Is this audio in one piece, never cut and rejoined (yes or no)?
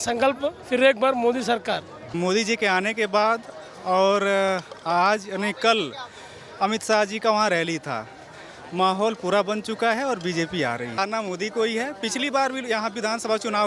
no